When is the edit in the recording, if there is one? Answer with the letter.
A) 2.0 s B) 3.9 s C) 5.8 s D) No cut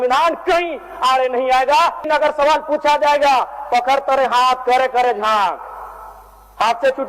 A